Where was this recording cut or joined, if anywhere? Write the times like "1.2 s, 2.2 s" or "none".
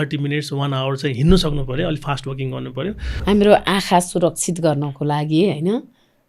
3.0 s